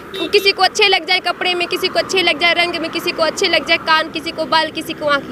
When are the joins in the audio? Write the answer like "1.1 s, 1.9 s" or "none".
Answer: none